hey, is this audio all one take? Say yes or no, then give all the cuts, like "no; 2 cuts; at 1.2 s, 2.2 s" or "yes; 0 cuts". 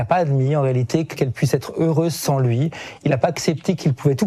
no; 1 cut; at 1.1 s